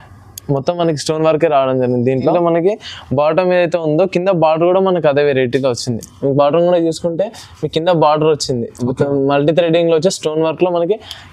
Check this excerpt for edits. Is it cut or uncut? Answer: cut